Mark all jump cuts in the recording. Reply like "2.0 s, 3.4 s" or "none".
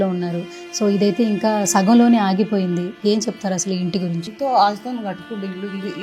4.3 s